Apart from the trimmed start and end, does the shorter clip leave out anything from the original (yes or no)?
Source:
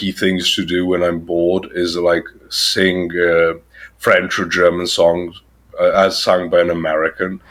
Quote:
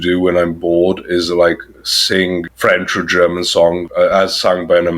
yes